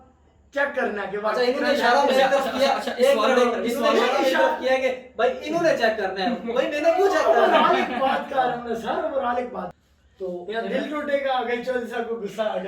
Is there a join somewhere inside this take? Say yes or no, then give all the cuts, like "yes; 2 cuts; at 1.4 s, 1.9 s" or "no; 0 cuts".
yes; 1 cut; at 9.7 s